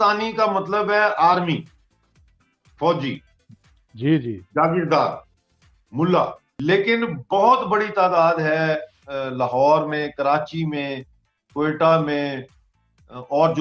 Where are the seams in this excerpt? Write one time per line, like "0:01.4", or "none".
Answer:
0:06.4